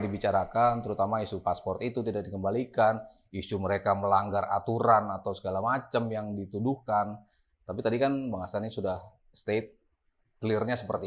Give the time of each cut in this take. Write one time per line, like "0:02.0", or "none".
none